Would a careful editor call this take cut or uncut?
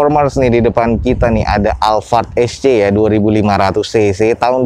uncut